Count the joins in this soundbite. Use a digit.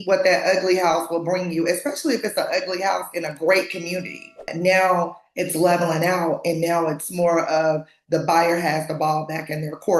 1